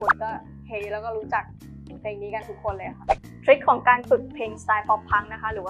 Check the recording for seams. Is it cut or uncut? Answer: cut